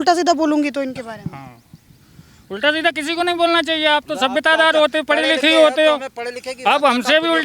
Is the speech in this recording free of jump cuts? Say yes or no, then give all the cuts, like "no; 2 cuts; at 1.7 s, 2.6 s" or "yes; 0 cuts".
yes; 0 cuts